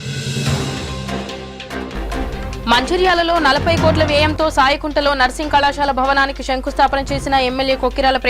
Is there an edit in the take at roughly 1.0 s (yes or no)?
yes